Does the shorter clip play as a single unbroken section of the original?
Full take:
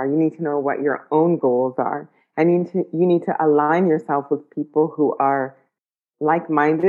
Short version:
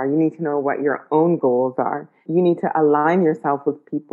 no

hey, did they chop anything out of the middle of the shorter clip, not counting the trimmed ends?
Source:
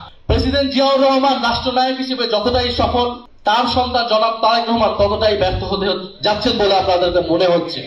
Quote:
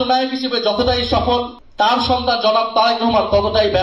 no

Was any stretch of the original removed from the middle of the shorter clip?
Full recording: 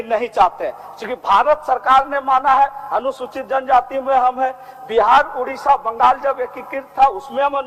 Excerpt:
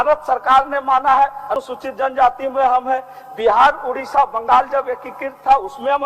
yes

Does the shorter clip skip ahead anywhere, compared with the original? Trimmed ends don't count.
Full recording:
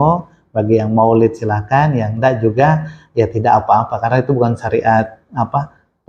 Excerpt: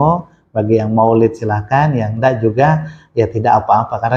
no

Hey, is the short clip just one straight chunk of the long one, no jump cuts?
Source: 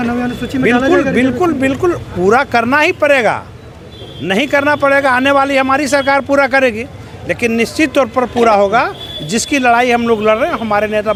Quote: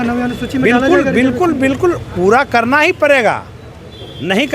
yes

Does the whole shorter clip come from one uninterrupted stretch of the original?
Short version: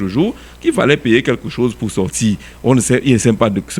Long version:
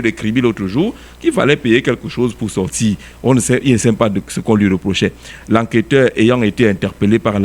yes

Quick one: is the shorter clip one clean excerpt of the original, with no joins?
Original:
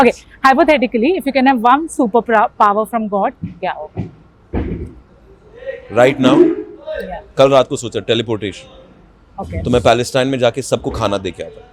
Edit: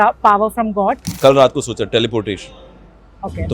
no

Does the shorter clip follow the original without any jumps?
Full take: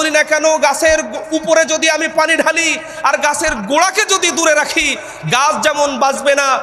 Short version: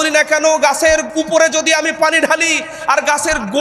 no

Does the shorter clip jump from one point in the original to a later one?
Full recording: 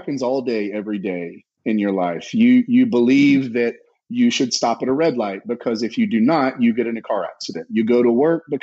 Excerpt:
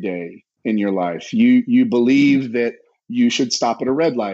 no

